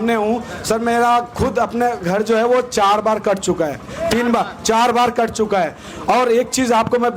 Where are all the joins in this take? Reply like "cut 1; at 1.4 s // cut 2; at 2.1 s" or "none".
none